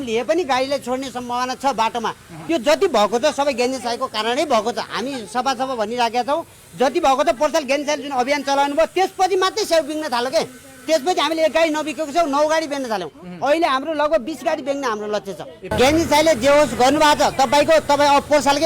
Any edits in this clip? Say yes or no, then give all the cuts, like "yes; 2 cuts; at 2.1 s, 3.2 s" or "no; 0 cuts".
yes; 2 cuts; at 2.4 s, 15.7 s